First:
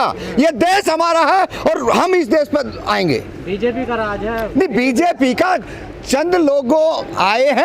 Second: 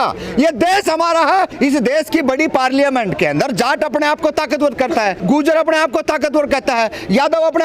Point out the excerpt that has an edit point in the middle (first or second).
second